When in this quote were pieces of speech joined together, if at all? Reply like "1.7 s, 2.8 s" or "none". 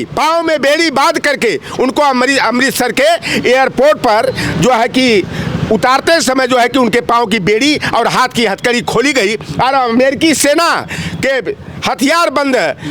none

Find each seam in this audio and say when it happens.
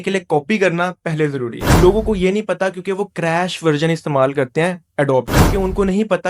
1.6 s

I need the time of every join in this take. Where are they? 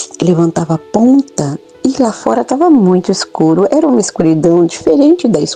none

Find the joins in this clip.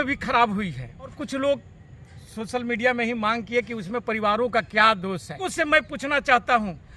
1.2 s, 5.5 s

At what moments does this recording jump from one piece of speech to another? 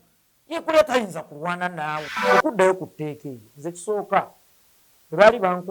2.2 s

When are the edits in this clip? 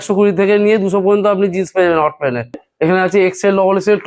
2.7 s

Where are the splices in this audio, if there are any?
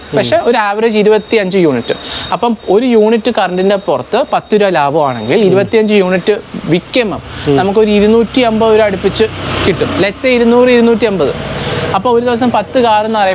none

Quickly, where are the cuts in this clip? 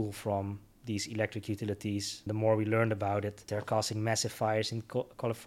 2.2 s, 3.4 s

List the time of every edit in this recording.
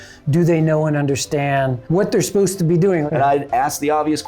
1.8 s, 3.1 s

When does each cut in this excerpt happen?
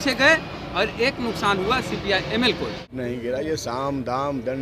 2.9 s

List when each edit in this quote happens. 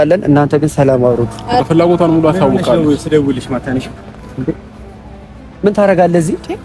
1.6 s

